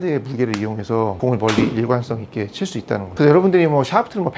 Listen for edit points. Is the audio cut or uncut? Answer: cut